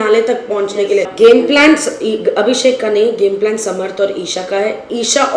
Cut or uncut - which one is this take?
cut